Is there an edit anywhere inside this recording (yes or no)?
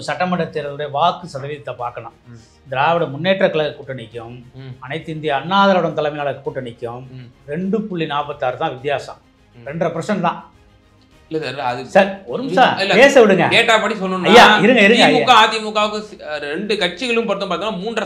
no